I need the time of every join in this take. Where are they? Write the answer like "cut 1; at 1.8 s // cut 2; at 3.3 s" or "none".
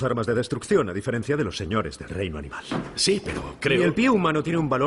cut 1; at 2.9 s

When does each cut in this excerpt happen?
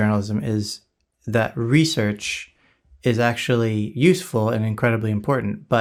none

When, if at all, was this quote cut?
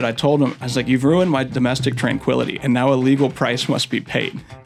none

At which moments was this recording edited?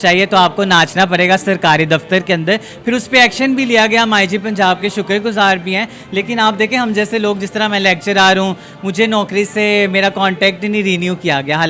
none

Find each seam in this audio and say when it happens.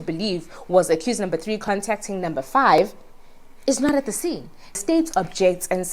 cut 1; at 4.8 s

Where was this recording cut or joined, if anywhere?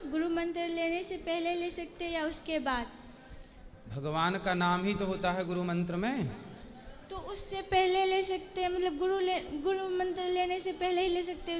none

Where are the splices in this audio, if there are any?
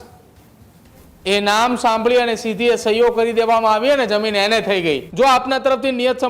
cut 1; at 5.1 s

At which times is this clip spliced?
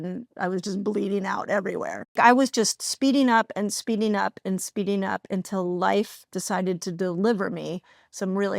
cut 1; at 2.2 s

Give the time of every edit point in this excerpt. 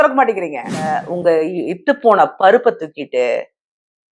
cut 1; at 1.1 s

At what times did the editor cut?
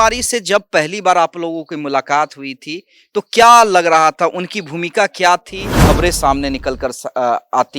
cut 1; at 5.8 s

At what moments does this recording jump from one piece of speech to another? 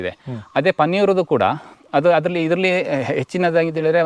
none

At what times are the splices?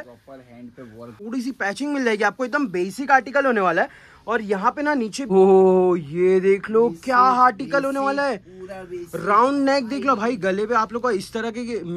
cut 1; at 1.2 s // cut 2; at 5.3 s

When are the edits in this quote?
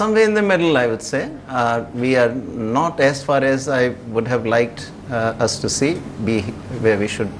cut 1; at 3.4 s

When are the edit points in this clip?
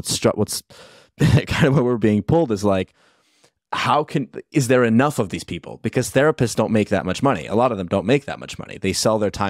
none

